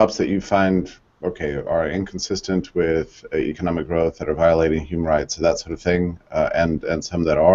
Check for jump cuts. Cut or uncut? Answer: uncut